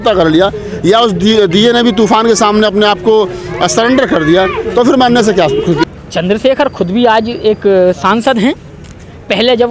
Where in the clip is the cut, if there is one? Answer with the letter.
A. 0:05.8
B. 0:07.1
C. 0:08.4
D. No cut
A